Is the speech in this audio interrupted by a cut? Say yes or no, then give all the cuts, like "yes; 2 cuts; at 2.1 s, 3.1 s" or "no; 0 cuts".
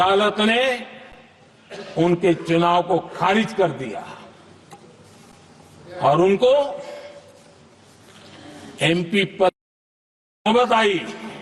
no; 0 cuts